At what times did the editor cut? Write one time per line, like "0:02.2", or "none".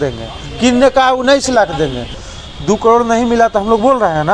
0:02.1